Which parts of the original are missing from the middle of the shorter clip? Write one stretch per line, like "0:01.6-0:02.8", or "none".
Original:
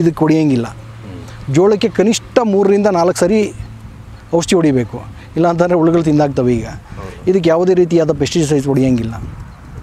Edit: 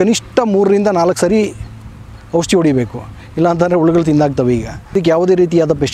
0:06.9-0:07.3